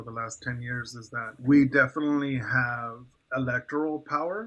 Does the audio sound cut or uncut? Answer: cut